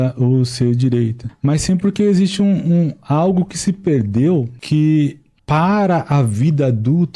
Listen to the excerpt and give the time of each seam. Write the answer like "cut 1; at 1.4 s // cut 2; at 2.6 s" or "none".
cut 1; at 1.2 s // cut 2; at 4.6 s // cut 3; at 5.3 s

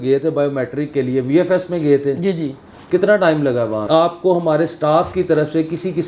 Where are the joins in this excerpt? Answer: cut 1; at 3.8 s

